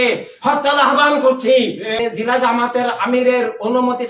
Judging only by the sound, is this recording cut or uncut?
cut